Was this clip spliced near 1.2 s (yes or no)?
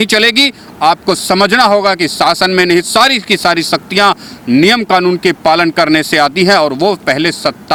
no